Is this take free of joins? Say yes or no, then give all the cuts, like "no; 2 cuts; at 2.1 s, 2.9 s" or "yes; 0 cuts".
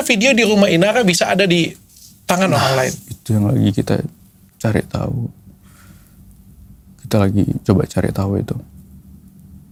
yes; 0 cuts